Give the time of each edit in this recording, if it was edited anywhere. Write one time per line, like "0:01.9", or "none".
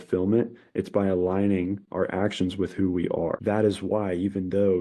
0:03.4